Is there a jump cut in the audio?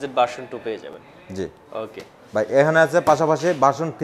no; 0 cuts

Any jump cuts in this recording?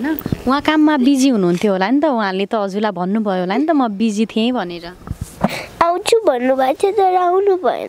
no; 0 cuts

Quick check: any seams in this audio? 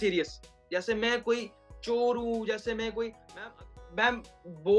yes; 1 cut; at 3.3 s

